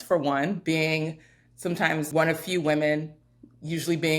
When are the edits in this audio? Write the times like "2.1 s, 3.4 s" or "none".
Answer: 2.1 s

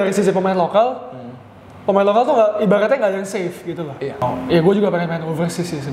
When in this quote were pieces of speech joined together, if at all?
4.2 s

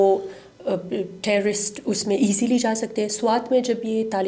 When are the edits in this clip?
none

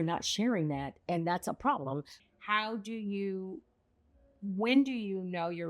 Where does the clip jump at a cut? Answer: 2.2 s

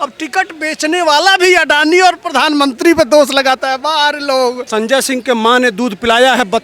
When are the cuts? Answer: 4.6 s

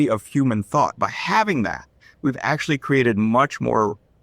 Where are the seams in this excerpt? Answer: 1.0 s

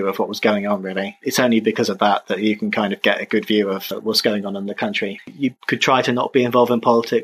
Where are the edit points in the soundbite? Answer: 1.2 s, 5.3 s

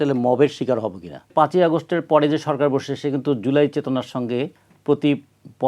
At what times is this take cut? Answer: 1.3 s

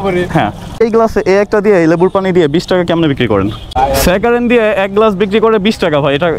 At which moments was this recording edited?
0.8 s, 3.6 s

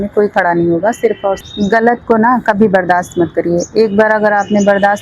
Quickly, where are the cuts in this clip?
1.4 s

